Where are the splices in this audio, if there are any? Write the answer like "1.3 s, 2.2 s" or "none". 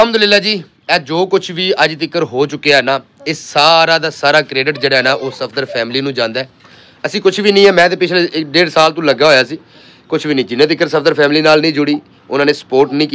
none